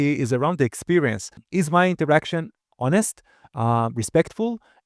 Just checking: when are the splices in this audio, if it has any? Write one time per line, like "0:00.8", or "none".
0:01.4